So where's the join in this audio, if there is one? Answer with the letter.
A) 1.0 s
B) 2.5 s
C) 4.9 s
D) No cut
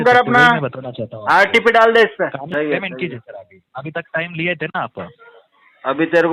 B